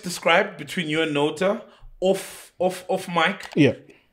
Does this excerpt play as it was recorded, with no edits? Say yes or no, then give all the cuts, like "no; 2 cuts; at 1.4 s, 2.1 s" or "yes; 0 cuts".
yes; 0 cuts